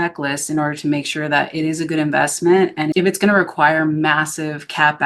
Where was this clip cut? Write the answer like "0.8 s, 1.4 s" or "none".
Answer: none